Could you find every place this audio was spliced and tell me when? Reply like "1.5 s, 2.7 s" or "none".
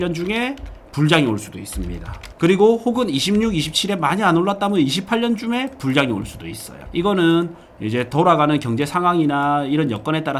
none

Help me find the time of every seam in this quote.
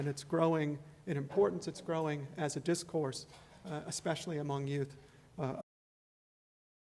none

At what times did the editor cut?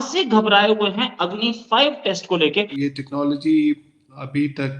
2.7 s

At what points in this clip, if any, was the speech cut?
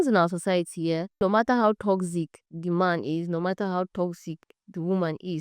1.2 s

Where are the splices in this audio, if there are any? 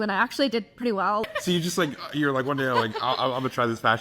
1.2 s

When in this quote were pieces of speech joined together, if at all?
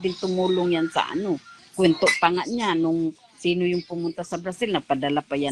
none

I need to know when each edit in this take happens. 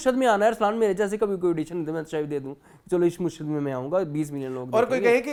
none

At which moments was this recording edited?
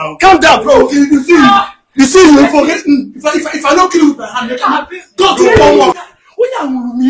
5.9 s

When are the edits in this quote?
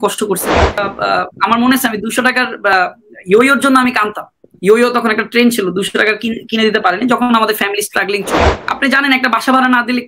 0.9 s, 8.4 s

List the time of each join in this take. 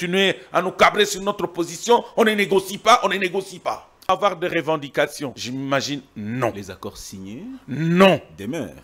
4.1 s, 5.4 s

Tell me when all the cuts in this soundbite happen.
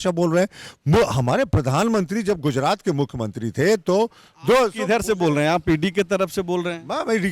none

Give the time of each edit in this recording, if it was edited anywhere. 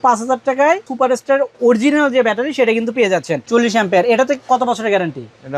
0.9 s, 3.4 s

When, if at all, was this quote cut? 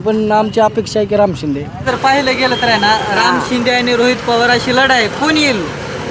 1.8 s

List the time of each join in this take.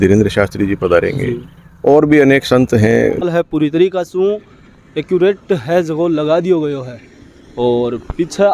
3.3 s

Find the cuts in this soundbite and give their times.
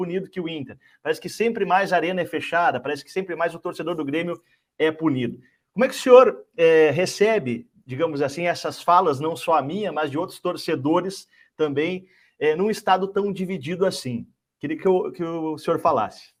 none

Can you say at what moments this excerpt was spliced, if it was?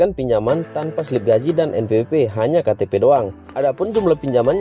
3.4 s

